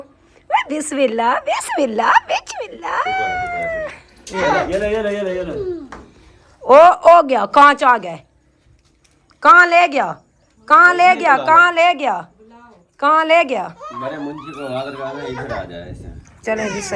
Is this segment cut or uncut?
uncut